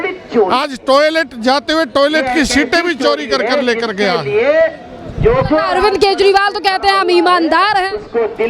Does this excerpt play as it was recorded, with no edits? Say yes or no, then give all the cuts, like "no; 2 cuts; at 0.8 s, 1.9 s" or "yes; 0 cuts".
yes; 0 cuts